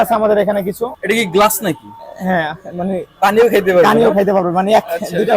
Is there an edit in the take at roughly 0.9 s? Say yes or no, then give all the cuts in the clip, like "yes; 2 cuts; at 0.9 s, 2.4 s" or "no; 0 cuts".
yes; 1 cut; at 0.9 s